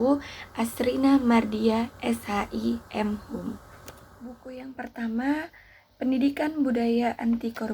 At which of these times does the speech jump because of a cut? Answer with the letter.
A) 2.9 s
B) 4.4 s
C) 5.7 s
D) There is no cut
B